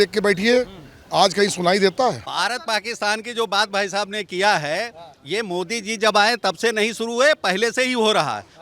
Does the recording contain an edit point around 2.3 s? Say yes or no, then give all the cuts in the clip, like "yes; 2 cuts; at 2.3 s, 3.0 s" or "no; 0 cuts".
yes; 1 cut; at 2.3 s